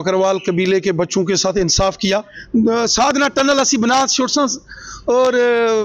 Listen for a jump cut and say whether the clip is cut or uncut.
cut